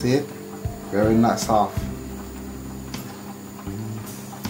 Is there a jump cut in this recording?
no; 0 cuts

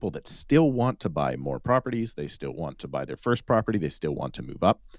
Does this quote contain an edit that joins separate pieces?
no; 0 cuts

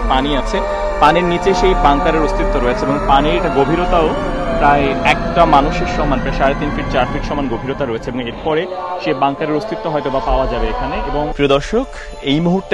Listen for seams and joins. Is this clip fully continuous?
yes; 0 cuts

